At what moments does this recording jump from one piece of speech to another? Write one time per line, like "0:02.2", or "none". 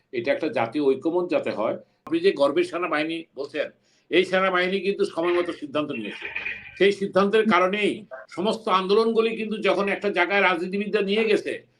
0:02.0